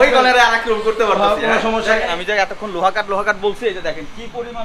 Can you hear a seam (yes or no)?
yes